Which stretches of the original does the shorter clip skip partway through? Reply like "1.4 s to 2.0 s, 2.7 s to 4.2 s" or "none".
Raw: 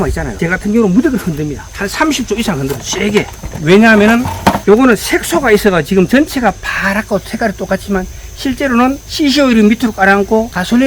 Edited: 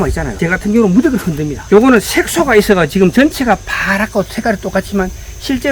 1.6 s to 4.6 s